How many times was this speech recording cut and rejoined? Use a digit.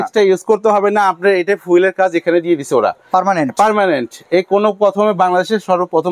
0